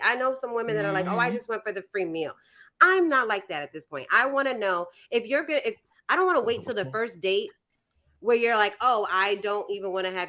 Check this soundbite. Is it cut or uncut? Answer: uncut